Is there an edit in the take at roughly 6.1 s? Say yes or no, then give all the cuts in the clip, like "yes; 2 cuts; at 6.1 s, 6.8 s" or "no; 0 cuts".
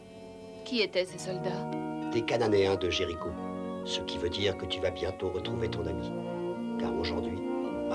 no; 1 cut; at 1.5 s